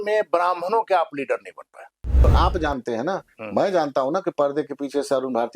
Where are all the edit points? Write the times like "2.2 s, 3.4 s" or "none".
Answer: 2.2 s